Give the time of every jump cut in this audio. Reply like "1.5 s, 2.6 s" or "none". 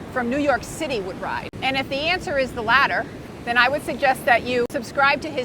1.5 s, 3.2 s, 4.7 s